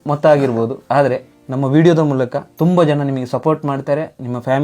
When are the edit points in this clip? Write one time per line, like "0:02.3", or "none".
0:00.9
0:02.4